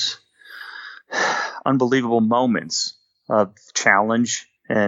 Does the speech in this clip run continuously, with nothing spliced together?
yes; 0 cuts

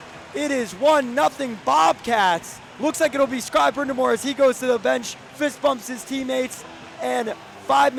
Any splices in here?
no; 0 cuts

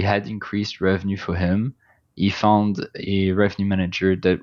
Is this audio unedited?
yes; 0 cuts

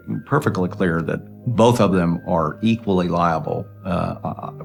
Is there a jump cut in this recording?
no; 0 cuts

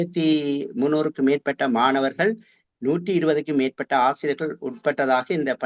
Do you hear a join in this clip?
no; 0 cuts

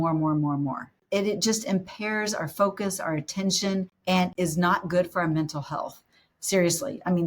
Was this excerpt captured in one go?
no; 2 cuts; at 1.0 s, 4.3 s

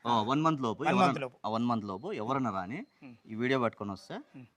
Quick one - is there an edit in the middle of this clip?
no; 0 cuts

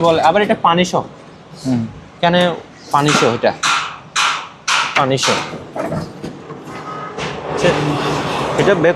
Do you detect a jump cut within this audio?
no; 0 cuts

